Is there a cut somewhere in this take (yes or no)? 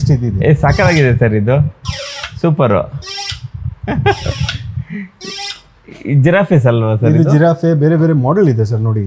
no